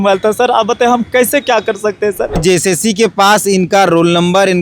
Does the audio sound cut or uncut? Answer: cut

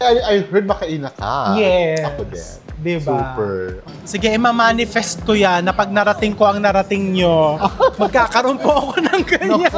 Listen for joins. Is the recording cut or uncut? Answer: cut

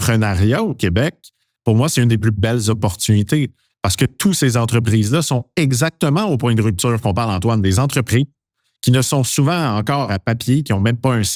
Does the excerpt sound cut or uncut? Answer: uncut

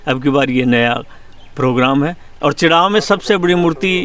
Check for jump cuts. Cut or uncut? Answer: cut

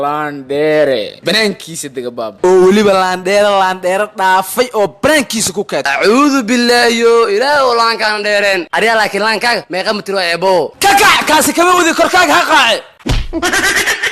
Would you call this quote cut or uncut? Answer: cut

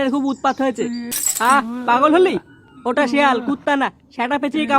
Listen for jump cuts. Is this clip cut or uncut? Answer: cut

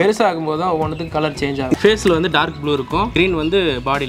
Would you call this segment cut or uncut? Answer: cut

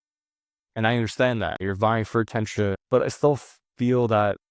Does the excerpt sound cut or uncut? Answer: cut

